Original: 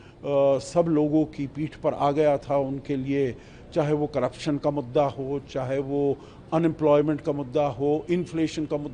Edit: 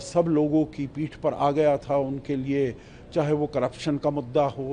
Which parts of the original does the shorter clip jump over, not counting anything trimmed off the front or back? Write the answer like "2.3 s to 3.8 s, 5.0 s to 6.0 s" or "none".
none